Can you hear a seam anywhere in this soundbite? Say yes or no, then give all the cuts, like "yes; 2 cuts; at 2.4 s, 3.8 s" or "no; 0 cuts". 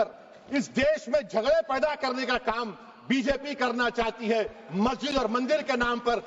no; 0 cuts